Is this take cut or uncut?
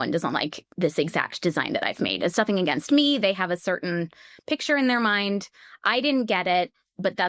uncut